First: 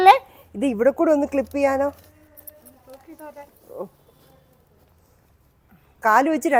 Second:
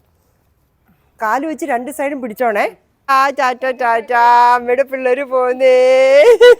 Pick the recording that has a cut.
second; 1 cut; at 3.1 s

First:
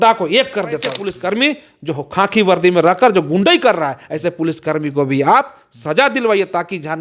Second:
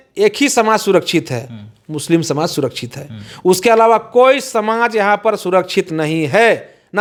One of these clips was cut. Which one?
first; 1 cut; at 1.1 s

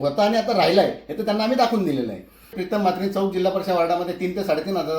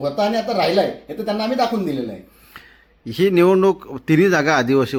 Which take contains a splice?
first; 1 cut; at 2.6 s

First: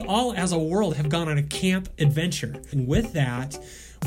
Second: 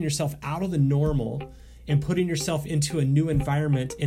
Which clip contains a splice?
first; 1 cut; at 2.7 s

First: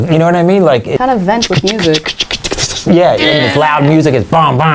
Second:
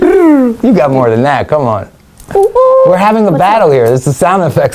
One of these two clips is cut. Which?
first; 1 cut; at 1.0 s

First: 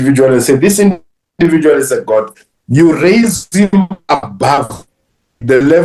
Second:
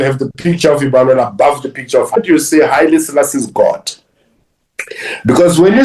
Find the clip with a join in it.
second; 1 cut; at 2.2 s

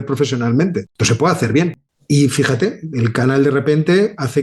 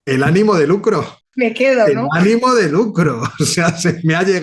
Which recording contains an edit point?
first; 1 cut; at 1.9 s

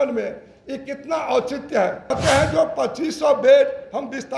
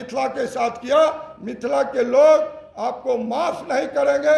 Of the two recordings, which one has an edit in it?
first; 1 cut; at 2.1 s

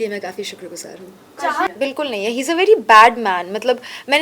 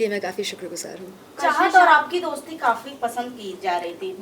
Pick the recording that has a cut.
first; 1 cut; at 1.7 s

